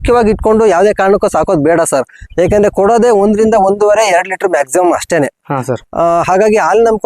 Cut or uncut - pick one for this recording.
uncut